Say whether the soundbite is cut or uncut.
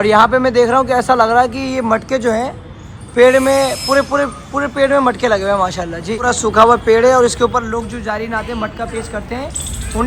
cut